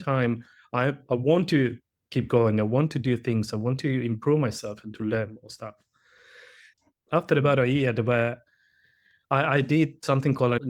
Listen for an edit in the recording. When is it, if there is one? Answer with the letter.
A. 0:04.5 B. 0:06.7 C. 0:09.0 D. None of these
B